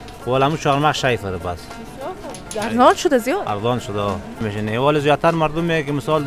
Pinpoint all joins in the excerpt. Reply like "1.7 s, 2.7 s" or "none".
4.4 s